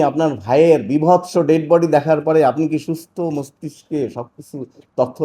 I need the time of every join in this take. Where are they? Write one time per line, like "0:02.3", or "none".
none